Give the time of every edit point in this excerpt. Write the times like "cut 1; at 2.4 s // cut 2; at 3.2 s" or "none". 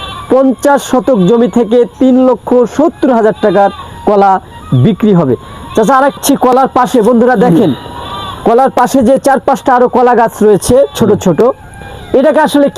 cut 1; at 6.2 s